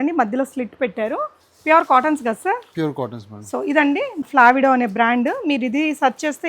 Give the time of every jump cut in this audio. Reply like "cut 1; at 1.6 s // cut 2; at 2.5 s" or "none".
cut 1; at 4.2 s